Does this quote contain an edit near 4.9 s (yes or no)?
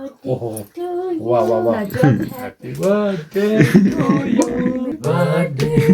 yes